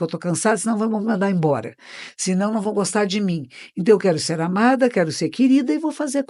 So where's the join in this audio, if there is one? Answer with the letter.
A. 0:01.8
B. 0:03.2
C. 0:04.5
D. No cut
D